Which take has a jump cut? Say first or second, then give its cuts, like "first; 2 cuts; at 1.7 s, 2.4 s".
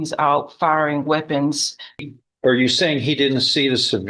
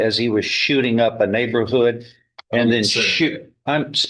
first; 1 cut; at 2.0 s